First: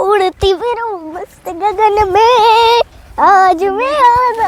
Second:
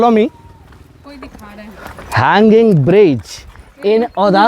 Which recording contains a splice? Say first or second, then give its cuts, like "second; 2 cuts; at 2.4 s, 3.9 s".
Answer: second; 1 cut; at 1.0 s